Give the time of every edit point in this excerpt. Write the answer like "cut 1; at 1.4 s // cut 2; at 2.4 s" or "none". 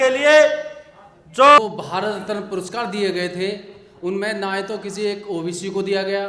cut 1; at 1.6 s

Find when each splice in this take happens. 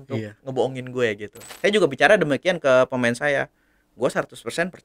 cut 1; at 1.4 s

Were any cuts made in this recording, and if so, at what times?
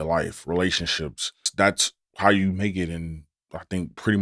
cut 1; at 1.5 s

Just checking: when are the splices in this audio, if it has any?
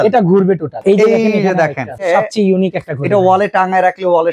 cut 1; at 0.8 s // cut 2; at 2.1 s

